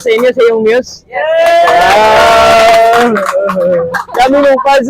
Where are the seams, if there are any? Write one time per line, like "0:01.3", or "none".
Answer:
0:03.9